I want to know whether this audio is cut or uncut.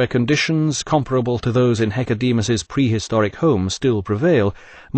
cut